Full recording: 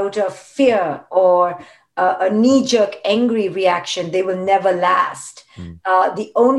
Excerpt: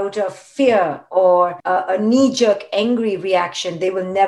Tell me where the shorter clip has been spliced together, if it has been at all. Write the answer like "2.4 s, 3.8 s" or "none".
1.6 s